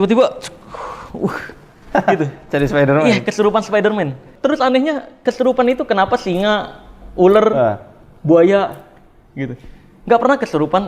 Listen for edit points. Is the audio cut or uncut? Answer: cut